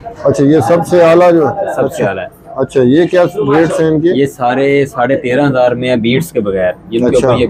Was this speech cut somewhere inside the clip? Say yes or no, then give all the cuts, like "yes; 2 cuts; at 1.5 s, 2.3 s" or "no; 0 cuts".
no; 0 cuts